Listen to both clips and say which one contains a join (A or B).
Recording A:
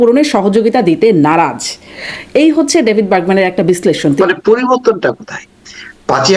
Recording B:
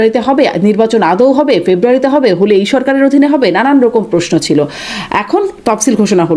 A